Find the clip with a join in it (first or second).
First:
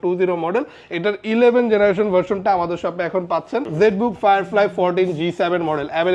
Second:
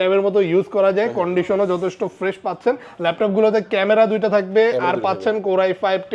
first